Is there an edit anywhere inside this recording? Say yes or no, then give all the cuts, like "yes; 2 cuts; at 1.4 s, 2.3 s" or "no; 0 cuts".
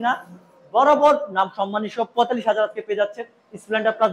no; 0 cuts